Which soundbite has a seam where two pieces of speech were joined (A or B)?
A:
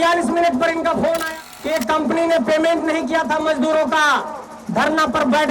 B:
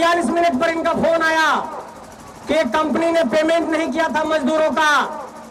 A